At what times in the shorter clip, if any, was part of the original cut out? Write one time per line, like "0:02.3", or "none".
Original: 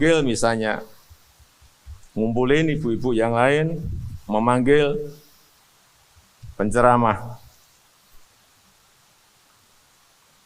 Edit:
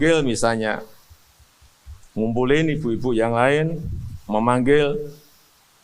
none